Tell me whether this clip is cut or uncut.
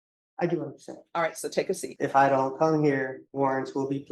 cut